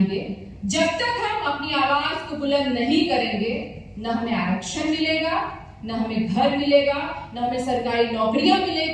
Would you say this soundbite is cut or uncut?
uncut